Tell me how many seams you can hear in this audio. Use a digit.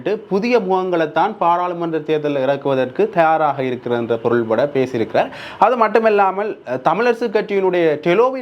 0